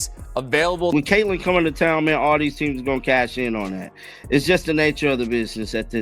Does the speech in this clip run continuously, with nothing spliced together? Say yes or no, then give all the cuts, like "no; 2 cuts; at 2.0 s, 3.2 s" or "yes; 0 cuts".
no; 1 cut; at 0.9 s